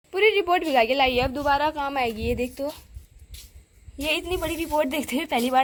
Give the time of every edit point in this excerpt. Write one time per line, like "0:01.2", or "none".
none